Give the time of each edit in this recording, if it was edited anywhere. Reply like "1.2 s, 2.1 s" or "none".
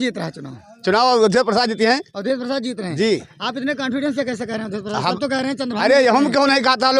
none